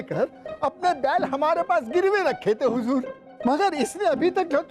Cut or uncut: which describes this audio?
cut